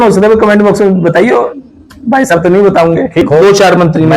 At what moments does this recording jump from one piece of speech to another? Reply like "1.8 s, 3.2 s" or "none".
3.2 s